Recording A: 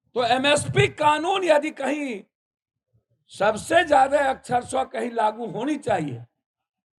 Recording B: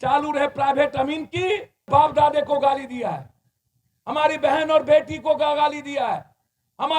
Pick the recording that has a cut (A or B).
B